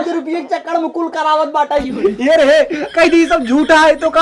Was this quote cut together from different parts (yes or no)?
no